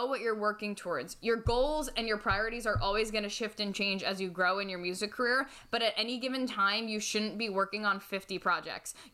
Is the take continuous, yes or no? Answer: yes